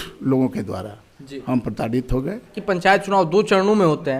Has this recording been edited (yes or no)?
yes